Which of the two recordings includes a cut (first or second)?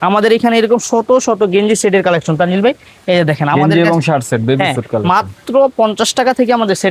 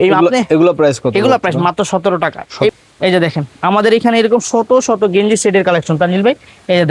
second